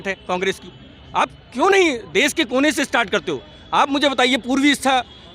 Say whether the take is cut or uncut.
uncut